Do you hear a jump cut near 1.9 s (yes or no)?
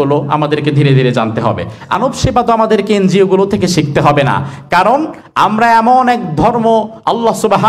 yes